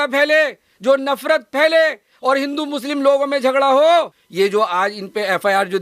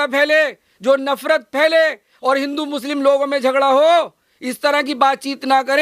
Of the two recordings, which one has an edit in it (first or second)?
first